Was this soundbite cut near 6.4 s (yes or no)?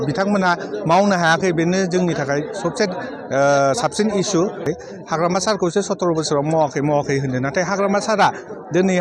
no